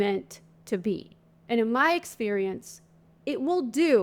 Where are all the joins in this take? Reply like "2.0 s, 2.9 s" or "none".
1.4 s

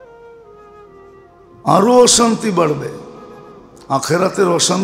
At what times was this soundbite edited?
0.9 s

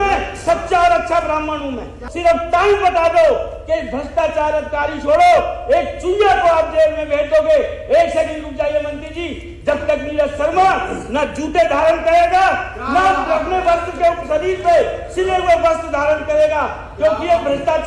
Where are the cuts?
2.0 s

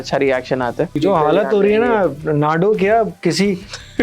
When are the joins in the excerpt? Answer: 0.9 s

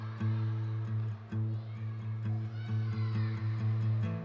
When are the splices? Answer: none

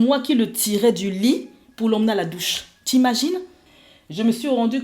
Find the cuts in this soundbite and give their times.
3.6 s

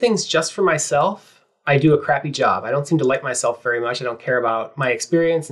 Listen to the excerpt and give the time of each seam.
none

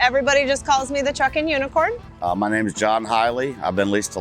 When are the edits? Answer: 2.1 s

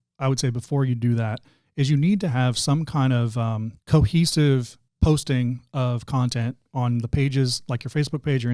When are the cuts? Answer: 3.7 s, 4.8 s

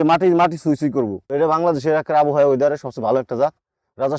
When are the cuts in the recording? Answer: 1.2 s

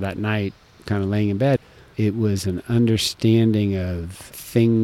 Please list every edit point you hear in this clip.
1.6 s

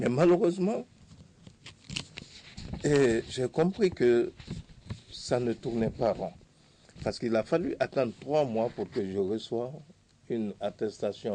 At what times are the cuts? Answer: none

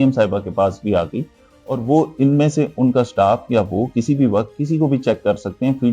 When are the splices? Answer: none

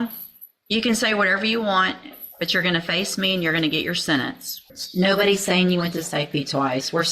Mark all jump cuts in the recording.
4.7 s

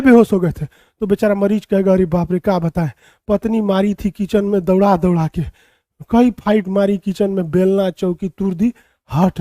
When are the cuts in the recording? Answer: none

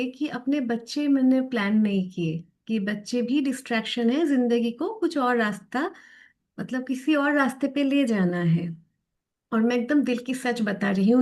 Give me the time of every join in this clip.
none

